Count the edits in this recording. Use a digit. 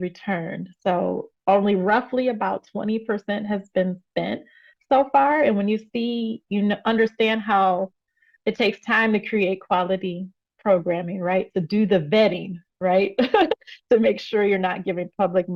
0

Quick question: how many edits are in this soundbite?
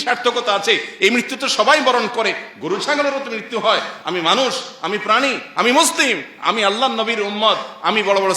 0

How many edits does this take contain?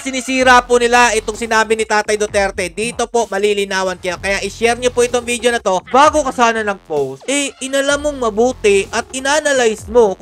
2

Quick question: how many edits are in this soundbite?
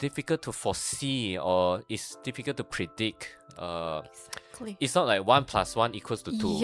0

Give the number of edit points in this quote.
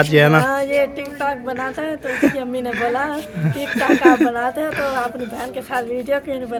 0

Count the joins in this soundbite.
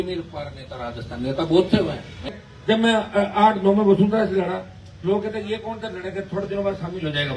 1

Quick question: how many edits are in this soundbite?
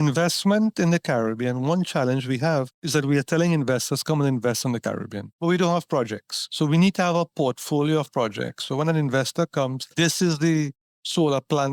0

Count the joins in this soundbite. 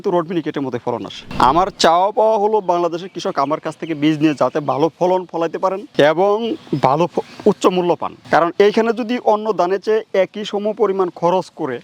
1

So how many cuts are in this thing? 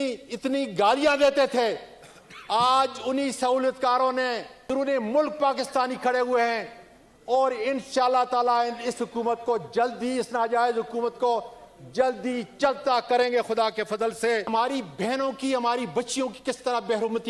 2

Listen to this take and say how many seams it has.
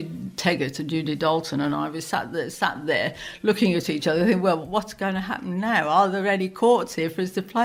0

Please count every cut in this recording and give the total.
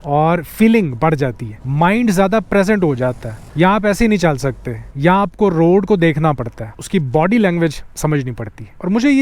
0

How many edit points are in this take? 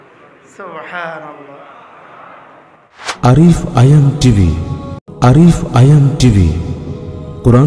1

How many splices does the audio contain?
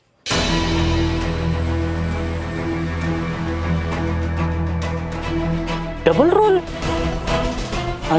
2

